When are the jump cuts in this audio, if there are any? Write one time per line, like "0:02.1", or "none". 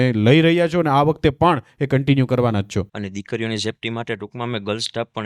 0:03.0